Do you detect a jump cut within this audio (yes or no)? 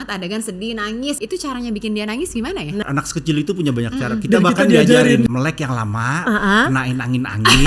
yes